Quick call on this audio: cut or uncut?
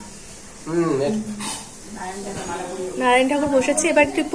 uncut